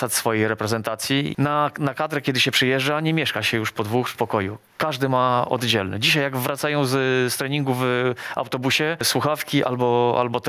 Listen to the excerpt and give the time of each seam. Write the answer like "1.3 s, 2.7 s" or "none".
1.3 s, 4.1 s, 9.1 s